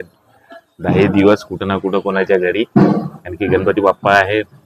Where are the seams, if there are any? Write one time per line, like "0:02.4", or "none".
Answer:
none